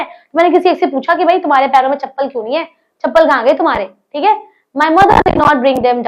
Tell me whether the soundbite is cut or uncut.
uncut